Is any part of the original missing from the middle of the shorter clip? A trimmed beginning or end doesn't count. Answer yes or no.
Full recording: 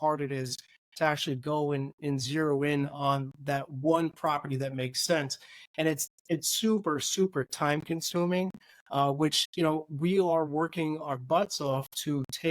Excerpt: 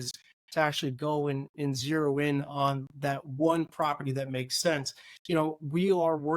yes